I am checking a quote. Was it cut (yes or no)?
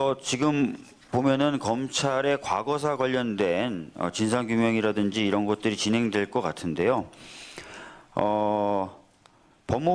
yes